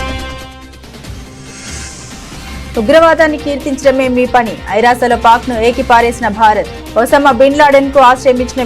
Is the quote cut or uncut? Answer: cut